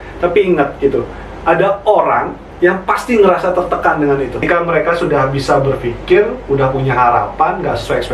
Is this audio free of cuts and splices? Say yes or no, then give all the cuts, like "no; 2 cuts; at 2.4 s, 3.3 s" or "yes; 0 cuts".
no; 1 cut; at 4.4 s